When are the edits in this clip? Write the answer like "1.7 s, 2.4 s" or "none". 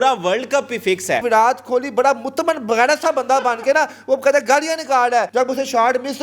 1.2 s, 5.3 s